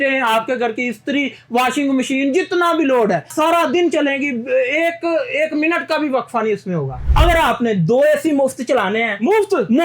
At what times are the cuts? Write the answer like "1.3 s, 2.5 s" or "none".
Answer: 3.3 s, 7.0 s

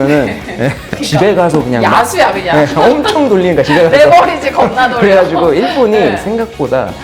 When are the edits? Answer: 1.0 s

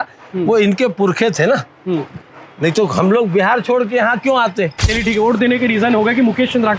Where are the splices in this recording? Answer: 4.9 s

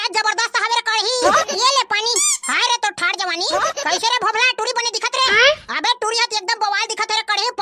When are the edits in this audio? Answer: 1.5 s

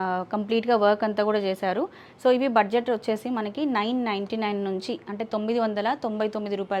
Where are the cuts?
none

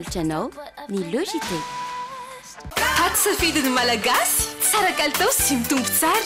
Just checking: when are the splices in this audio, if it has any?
2.5 s

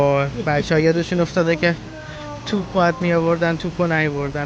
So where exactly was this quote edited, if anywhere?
none

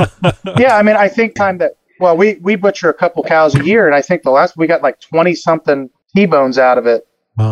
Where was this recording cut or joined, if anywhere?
1.3 s, 5.9 s

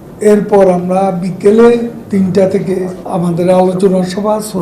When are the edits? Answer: 2.0 s, 3.0 s

